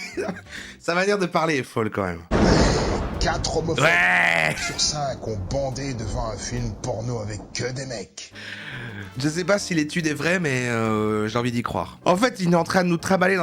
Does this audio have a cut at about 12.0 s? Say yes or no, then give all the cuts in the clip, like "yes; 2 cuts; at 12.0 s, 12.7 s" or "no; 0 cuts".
yes; 2 cuts; at 2.3 s, 12.0 s